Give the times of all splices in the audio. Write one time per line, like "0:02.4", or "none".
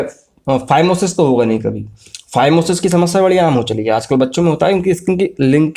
none